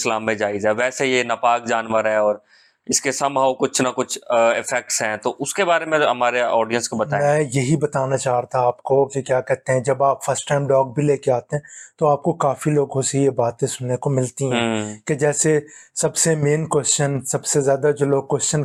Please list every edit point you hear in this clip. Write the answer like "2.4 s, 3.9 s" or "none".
none